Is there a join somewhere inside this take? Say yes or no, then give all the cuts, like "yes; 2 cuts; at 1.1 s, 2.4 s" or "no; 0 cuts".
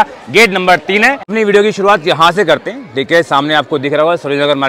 yes; 1 cut; at 1.3 s